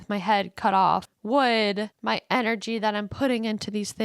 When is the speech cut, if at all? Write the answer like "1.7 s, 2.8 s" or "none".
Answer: 1.1 s, 1.9 s